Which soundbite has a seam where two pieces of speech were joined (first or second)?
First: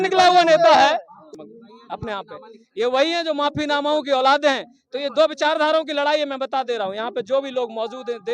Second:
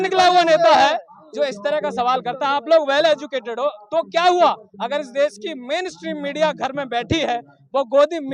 first